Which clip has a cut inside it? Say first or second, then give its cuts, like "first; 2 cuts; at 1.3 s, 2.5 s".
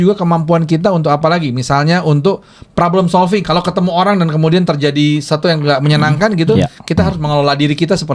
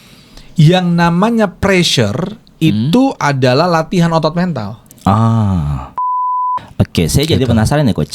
second; 1 cut; at 6.1 s